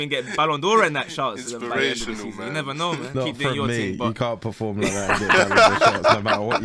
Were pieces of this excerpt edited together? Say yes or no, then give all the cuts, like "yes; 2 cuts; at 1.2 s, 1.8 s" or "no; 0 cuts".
yes; 1 cut; at 3.1 s